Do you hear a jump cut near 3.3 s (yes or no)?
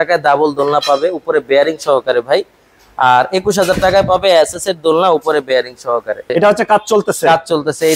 no